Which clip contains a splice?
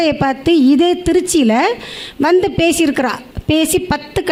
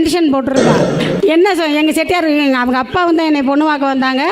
second; 1 cut; at 1.1 s

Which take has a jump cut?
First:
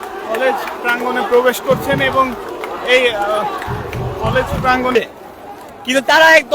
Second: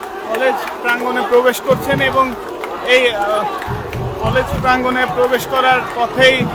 first; 1 cut; at 4.9 s

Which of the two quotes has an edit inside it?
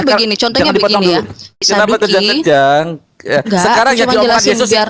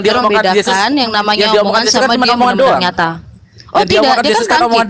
first; 1 cut; at 1.6 s

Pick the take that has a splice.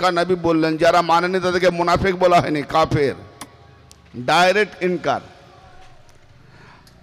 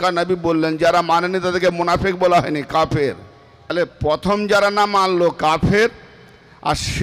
second; 1 cut; at 3.7 s

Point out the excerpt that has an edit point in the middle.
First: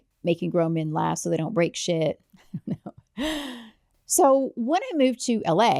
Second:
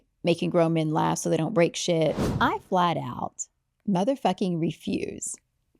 second; 1 cut; at 2.3 s

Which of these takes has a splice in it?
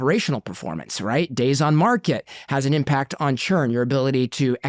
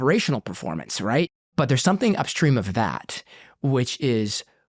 second; 1 cut; at 1.3 s

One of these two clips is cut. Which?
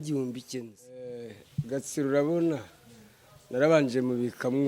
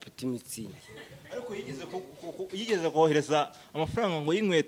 first; 1 cut; at 1.3 s

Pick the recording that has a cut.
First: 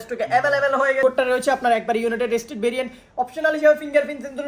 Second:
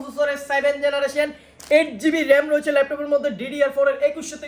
first; 1 cut; at 1.0 s

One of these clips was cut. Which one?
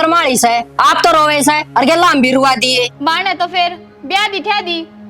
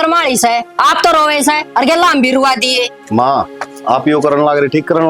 first; 1 cut; at 2.9 s

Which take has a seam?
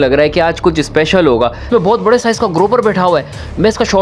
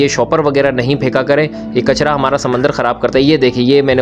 first; 1 cut; at 1.6 s

